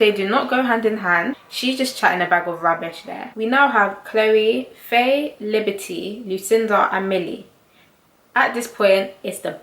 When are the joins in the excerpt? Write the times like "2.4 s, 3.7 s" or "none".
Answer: 1.5 s, 3.3 s